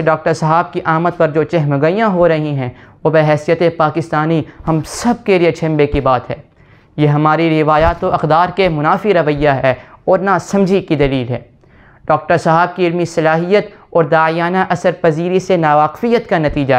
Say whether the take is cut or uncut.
uncut